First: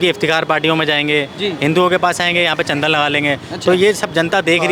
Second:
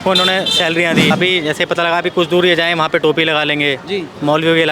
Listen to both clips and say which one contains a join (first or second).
second